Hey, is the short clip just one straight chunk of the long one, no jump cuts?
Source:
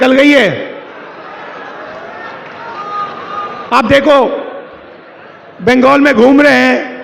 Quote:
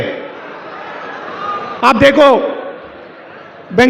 no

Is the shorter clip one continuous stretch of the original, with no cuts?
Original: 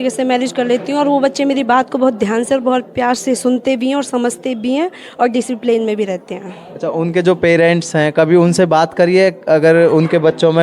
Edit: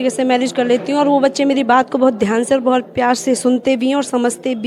yes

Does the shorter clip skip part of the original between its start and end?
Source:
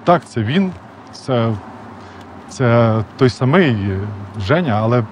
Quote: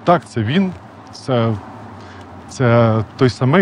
no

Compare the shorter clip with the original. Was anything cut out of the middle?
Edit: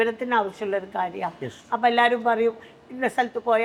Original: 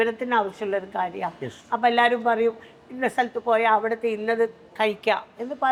no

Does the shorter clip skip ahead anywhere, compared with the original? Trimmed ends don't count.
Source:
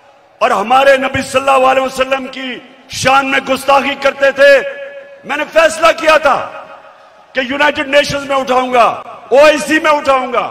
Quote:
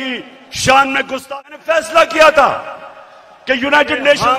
yes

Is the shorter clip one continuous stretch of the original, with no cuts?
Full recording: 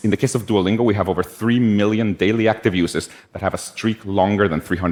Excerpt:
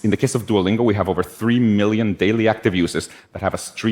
yes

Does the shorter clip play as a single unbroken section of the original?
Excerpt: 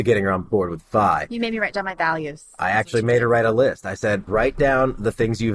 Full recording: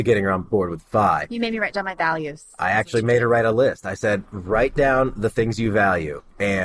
no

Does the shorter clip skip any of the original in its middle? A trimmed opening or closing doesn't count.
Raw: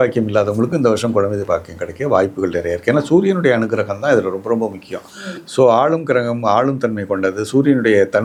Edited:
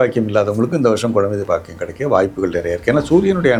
no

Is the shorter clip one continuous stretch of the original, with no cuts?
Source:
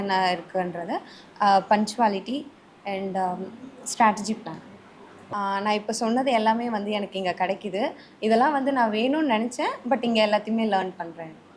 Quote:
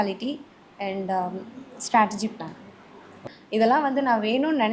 no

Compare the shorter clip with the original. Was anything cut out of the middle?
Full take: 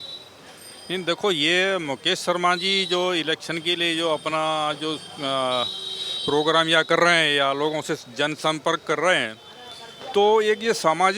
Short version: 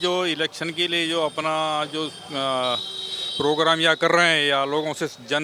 no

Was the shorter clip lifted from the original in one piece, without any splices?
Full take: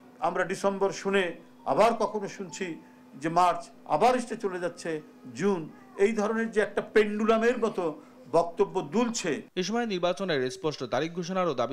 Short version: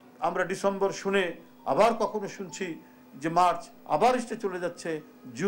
yes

